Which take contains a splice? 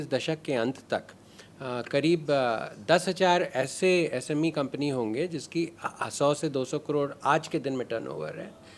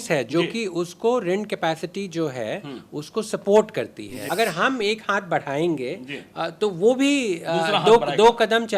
second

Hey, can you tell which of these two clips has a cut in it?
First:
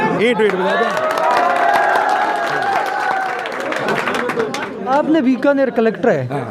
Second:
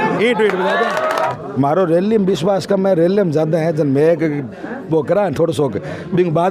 second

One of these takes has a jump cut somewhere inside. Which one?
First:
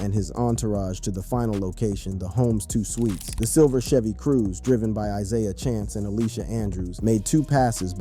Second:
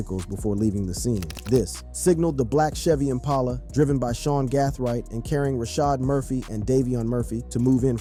first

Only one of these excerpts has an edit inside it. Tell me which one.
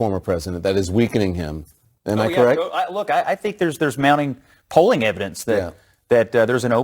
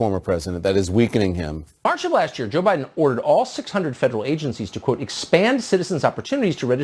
second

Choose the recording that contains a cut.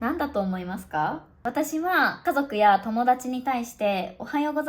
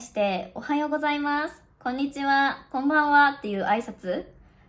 first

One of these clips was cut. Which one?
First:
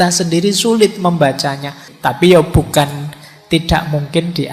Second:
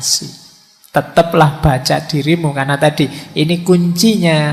first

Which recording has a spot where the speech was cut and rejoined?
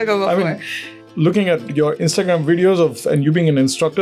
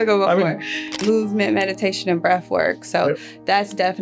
second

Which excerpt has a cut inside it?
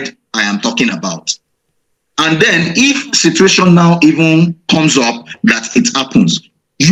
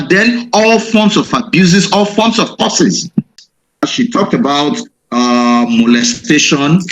second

